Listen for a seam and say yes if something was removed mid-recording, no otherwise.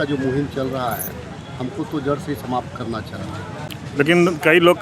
yes